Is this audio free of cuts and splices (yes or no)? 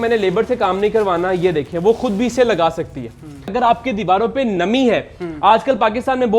no